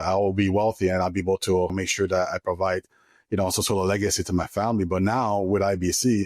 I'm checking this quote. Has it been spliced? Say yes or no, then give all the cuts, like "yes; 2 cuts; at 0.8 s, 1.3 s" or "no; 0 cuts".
yes; 1 cut; at 1.7 s